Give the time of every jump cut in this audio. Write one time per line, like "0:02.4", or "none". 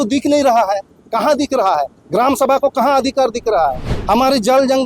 0:03.9